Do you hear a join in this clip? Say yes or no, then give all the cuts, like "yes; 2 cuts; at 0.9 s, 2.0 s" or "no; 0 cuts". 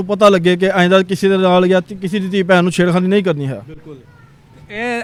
no; 0 cuts